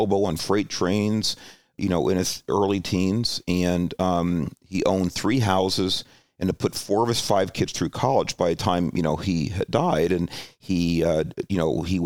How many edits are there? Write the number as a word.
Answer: one